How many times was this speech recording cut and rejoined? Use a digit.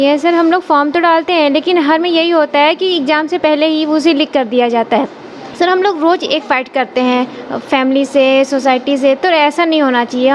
0